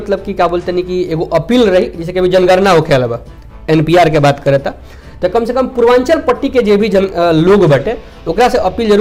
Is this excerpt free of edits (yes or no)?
yes